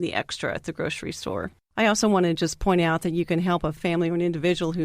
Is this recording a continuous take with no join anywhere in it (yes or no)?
no